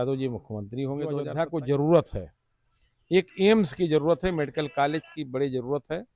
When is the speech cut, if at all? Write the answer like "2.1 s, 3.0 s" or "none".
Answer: 1.2 s

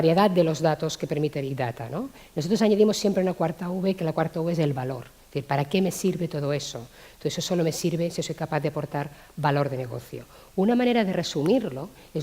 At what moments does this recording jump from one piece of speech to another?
3.2 s

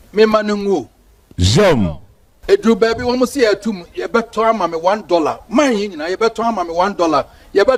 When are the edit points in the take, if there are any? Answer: none

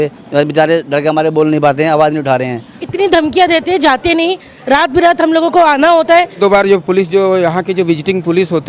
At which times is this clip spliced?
2.8 s, 6.4 s

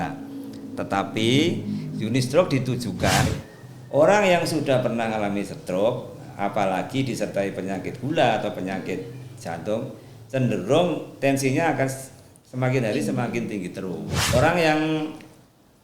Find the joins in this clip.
3.3 s, 14.3 s

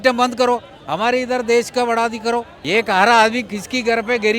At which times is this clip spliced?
2.5 s

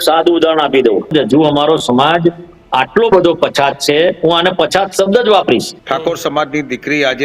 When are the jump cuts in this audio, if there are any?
1.1 s, 5.8 s

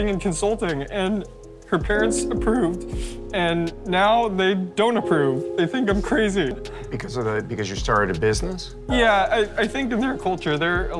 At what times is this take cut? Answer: none

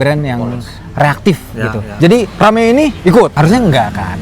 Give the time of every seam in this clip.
1.8 s

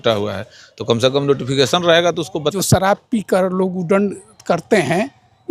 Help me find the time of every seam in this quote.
2.5 s

